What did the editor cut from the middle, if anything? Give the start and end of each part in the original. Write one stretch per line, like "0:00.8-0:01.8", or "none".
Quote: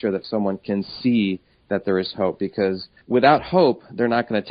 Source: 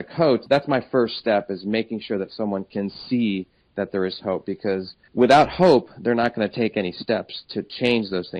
none